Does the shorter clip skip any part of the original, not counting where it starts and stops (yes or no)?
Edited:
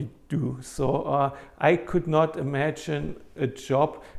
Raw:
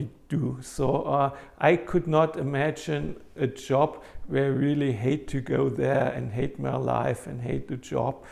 no